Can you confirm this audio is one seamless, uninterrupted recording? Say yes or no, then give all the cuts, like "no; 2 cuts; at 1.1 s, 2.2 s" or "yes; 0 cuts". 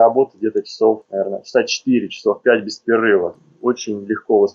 no; 2 cuts; at 1.1 s, 3.3 s